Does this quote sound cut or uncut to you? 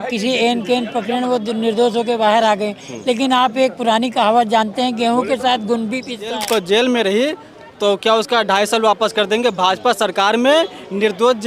cut